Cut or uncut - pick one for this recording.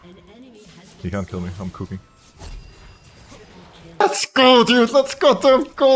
cut